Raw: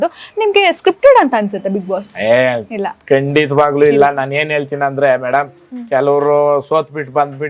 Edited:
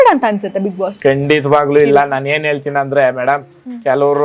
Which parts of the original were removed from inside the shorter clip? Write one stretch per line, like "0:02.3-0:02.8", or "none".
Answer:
0:02.0-0:03.0

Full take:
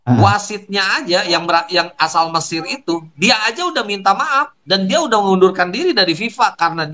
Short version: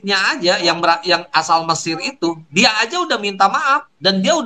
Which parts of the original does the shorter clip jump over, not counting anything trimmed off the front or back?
none

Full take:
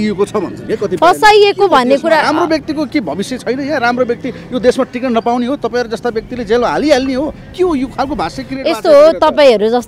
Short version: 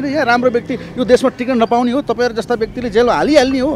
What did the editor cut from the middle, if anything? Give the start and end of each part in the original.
none

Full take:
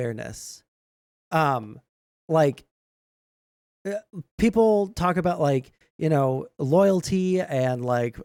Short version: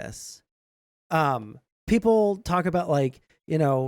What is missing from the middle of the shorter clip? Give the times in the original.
0:01.9-0:04.2

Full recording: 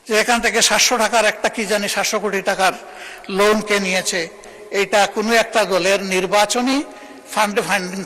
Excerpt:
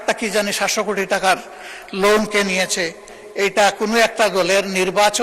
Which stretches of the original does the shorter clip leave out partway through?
none

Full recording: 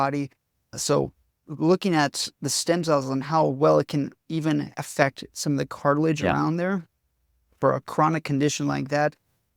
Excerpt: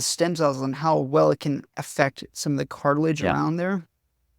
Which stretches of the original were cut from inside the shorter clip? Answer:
0:04.2-0:04.7

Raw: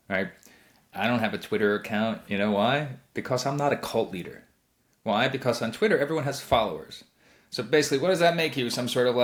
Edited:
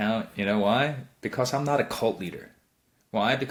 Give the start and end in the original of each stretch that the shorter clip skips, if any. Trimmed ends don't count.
none

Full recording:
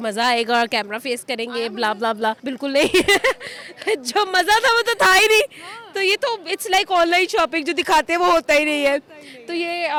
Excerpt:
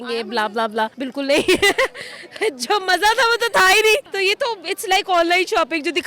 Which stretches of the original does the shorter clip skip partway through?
0:05.6-0:05.9

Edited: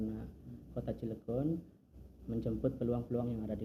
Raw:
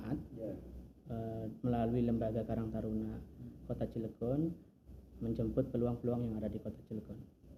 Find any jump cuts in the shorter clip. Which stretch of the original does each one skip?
none

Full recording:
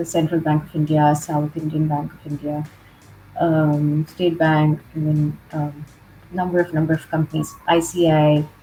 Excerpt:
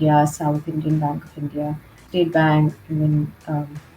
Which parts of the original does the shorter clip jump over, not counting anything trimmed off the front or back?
0:02.9-0:04.1

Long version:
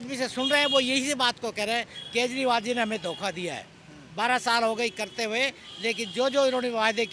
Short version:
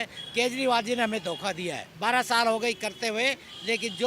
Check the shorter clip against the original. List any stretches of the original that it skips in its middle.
0:03.6-0:04.0

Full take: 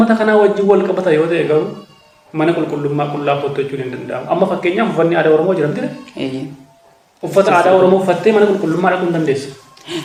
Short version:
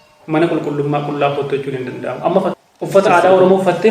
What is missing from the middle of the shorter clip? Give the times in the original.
0:04.6-0:07.0

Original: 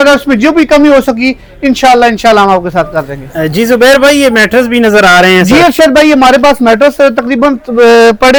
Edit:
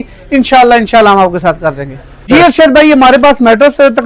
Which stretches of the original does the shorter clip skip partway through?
0:03.6-0:05.4

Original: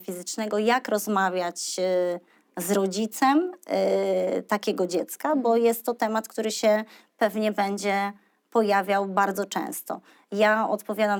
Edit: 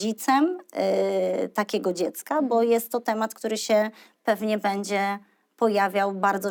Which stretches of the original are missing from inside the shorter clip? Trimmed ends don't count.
none

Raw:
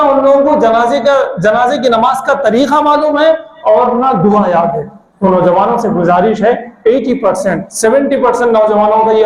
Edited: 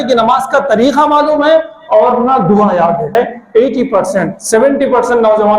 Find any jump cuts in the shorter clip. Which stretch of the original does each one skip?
0:04.9-0:06.4

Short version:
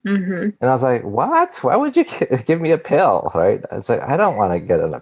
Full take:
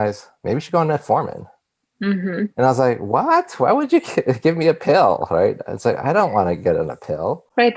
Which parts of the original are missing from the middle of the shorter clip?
none

